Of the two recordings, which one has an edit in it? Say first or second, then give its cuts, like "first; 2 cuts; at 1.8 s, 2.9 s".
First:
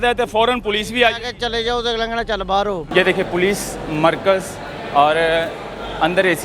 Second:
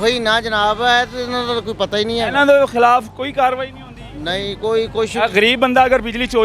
first; 1 cut; at 2.8 s